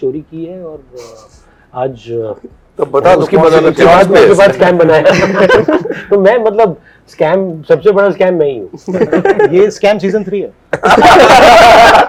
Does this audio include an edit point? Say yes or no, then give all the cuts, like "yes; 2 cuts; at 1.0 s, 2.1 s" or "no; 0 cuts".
no; 0 cuts